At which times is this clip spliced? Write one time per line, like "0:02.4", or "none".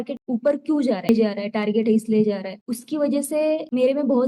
0:01.1